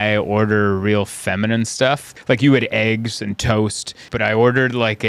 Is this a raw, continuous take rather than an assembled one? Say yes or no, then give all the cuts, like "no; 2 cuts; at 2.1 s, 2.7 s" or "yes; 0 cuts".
no; 2 cuts; at 2.1 s, 4.0 s